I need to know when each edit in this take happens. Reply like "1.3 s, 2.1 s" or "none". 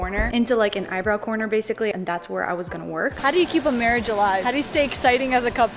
1.9 s, 3.2 s